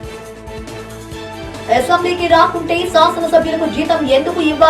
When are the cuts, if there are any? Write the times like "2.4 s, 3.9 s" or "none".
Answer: 1.4 s